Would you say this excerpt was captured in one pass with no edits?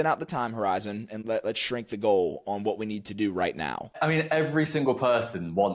no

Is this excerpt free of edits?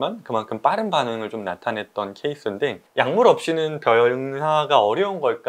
no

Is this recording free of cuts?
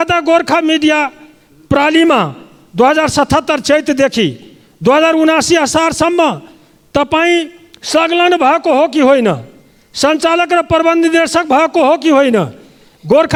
yes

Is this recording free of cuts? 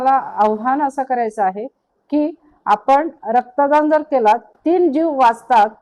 no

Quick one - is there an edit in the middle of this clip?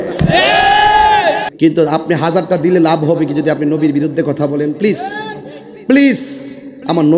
yes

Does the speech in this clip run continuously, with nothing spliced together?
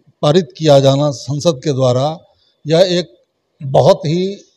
yes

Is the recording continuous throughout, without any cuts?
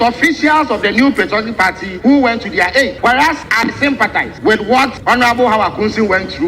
no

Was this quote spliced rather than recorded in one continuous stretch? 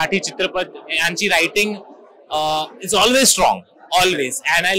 no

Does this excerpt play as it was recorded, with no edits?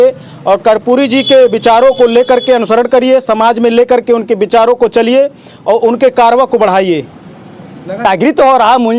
no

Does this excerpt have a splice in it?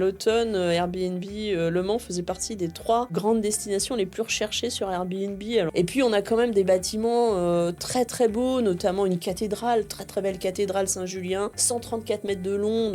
yes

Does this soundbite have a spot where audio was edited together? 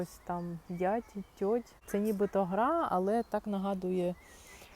yes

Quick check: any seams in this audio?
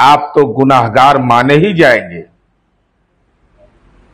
no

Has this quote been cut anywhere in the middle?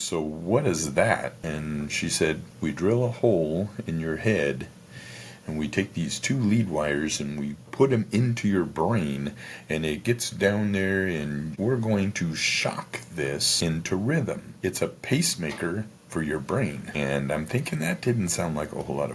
yes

